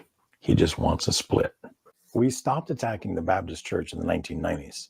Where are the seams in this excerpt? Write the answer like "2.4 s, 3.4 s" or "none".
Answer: 1.9 s